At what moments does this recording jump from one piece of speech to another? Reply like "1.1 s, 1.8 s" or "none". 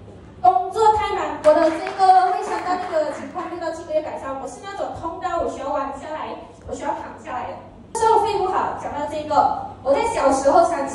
1.3 s, 8.0 s